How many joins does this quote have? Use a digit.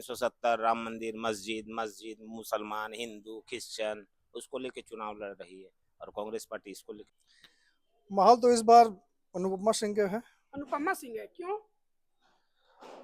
1